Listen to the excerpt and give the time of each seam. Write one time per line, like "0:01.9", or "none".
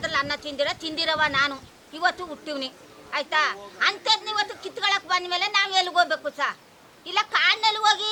none